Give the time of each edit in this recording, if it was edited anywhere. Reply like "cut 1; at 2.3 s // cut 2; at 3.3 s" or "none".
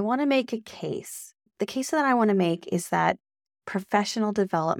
cut 1; at 1.5 s

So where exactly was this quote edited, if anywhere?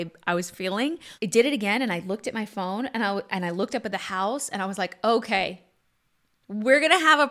cut 1; at 1.1 s

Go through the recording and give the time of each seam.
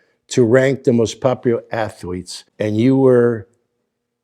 cut 1; at 2.4 s

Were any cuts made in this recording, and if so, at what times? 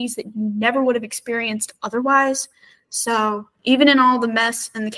cut 1; at 3.5 s

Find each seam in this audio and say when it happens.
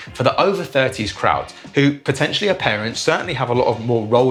none

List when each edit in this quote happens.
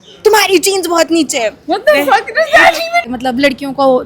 cut 1; at 3.1 s

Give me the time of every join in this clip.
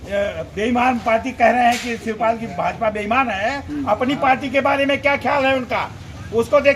none

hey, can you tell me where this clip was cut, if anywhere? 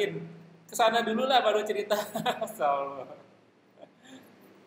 none

